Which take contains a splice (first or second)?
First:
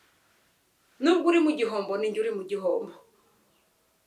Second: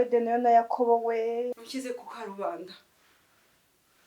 second